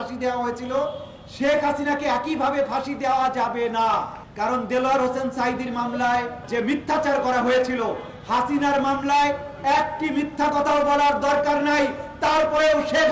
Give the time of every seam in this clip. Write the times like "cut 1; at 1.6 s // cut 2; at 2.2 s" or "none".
cut 1; at 4.2 s // cut 2; at 6.4 s